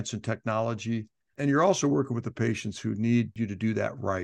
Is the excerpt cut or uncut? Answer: cut